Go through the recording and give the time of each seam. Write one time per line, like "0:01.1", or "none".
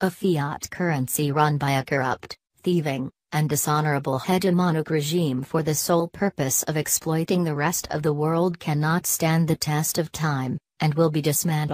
0:05.8